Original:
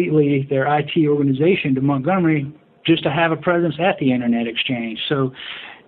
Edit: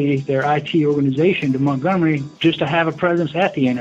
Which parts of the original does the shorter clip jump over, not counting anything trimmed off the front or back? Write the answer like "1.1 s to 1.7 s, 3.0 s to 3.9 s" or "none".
2.5 s to 2.7 s